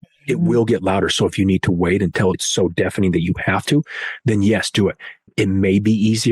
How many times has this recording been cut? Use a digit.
1